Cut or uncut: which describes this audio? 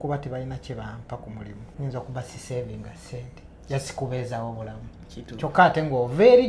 cut